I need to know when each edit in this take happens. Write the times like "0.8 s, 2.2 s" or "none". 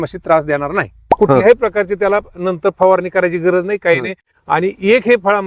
1.1 s